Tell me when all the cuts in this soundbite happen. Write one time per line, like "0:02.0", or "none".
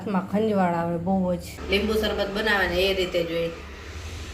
0:01.5